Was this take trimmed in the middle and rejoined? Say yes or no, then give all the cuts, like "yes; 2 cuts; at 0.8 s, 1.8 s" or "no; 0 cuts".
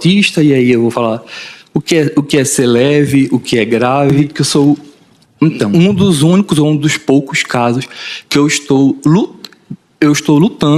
yes; 1 cut; at 4.3 s